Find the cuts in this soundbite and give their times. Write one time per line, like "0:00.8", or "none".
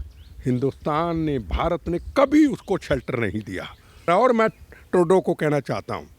0:04.1